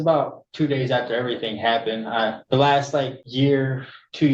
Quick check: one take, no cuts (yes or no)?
no